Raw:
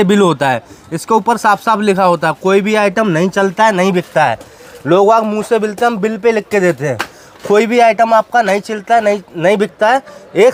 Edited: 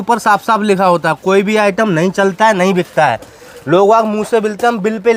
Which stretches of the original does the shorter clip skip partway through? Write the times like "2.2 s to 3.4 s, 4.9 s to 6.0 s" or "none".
none